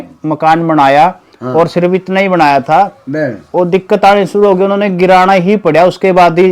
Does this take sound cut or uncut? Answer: uncut